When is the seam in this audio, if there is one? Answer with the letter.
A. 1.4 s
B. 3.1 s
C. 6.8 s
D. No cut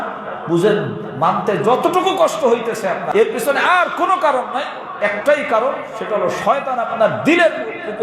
B